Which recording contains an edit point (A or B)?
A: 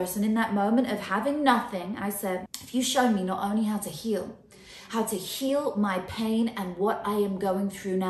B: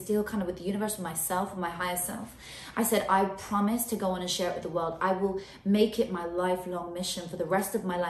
A